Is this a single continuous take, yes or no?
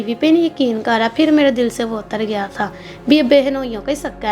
yes